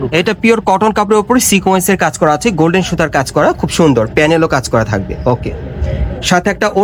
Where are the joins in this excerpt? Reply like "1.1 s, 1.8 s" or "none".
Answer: none